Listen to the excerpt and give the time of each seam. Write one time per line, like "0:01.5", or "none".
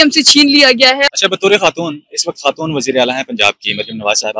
0:01.1